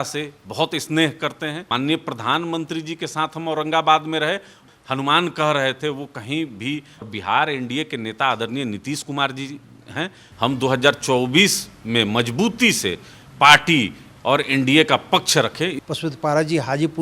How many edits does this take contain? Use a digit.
5